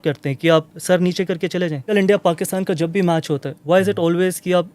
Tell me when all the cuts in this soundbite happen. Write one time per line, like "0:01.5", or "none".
0:01.9